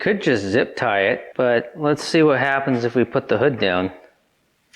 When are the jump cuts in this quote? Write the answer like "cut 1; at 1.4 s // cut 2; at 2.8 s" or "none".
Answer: cut 1; at 1.3 s